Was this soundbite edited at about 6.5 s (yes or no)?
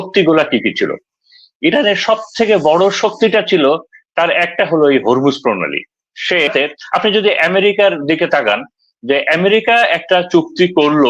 yes